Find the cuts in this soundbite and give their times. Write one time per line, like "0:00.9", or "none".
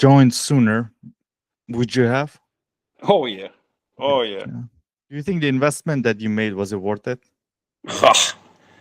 0:05.2